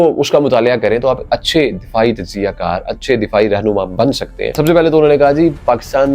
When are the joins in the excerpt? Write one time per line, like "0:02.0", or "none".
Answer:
0:04.6